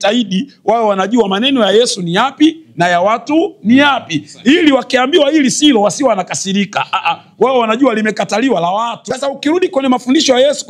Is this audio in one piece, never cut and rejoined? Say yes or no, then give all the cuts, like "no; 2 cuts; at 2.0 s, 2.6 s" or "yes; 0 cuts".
no; 1 cut; at 9.0 s